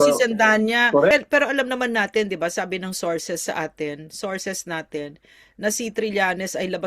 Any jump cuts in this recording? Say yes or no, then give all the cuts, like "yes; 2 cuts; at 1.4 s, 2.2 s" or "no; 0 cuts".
yes; 1 cut; at 1.1 s